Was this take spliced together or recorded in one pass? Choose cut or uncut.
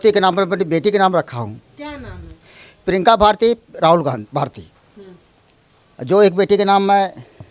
uncut